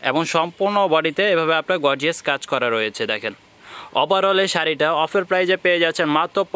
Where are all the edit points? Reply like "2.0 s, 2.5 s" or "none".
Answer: none